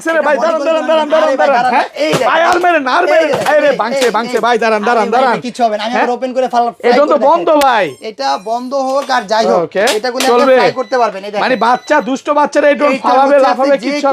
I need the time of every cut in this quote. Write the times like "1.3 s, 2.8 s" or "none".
none